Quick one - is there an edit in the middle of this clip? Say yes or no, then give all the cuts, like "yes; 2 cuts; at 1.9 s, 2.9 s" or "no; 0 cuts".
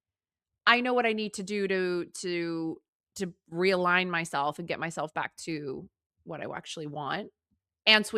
no; 0 cuts